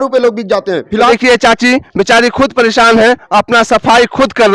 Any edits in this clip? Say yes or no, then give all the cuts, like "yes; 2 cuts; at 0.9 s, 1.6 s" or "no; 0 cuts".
yes; 1 cut; at 1.1 s